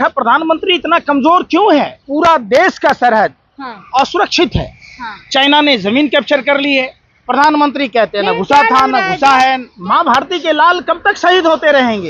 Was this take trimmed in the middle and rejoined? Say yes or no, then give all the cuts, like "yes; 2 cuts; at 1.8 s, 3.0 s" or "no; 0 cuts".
yes; 2 cuts; at 2.0 s, 9.7 s